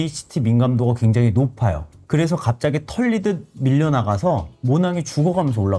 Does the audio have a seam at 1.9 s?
no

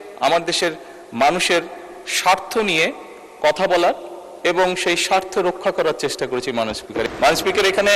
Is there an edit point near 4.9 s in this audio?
no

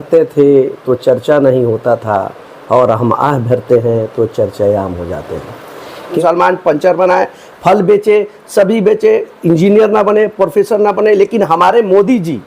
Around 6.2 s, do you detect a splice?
yes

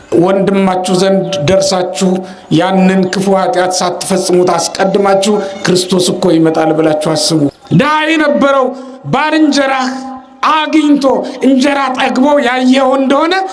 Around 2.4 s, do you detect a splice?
no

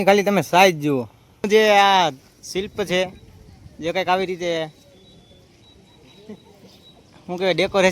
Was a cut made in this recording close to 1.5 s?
yes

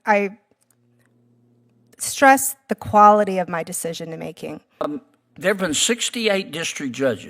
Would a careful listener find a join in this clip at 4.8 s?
yes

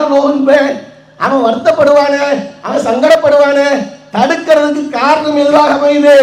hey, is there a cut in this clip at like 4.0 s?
no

